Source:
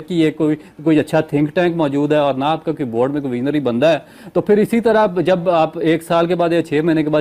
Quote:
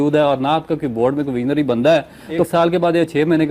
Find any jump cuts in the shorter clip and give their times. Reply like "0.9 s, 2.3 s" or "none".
2.5 s